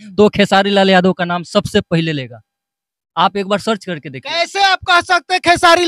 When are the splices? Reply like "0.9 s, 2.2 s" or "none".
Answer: none